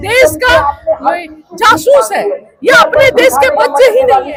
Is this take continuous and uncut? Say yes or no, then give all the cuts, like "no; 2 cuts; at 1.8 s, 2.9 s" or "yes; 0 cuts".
yes; 0 cuts